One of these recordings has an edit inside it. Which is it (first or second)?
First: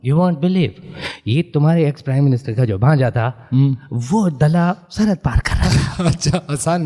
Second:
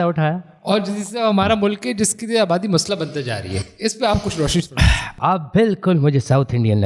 second